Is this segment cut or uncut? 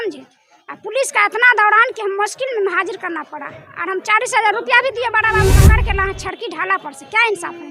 cut